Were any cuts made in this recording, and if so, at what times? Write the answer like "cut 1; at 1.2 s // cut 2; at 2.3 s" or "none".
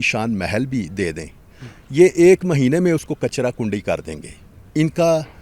none